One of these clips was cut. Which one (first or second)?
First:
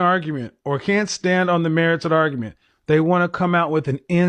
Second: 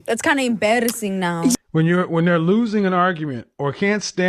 second